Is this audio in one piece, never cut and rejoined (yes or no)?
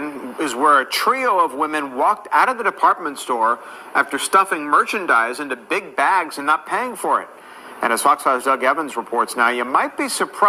yes